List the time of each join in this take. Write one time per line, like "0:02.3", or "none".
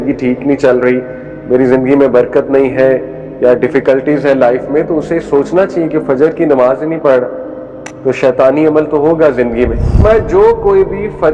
0:10.0